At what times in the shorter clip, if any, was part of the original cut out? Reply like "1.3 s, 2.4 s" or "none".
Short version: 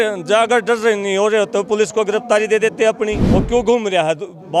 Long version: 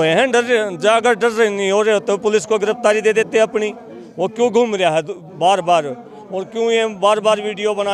3.3 s